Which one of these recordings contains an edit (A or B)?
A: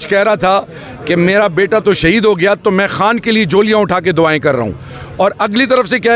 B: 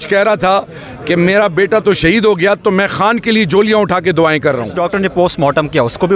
B